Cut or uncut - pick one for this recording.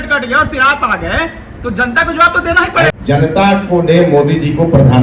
cut